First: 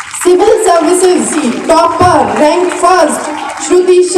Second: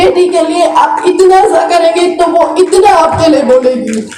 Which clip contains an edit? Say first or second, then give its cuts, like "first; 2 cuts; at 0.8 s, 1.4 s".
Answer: first; 1 cut; at 1.4 s